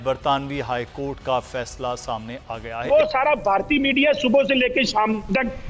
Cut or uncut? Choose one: cut